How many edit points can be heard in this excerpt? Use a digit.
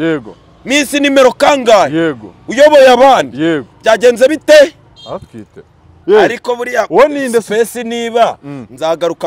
1